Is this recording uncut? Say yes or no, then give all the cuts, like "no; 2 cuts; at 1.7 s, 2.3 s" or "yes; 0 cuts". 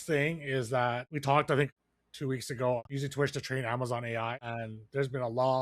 no; 4 cuts; at 1.1 s, 1.7 s, 2.8 s, 4.5 s